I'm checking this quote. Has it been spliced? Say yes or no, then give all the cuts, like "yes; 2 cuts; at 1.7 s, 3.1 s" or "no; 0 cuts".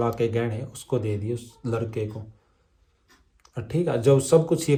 no; 0 cuts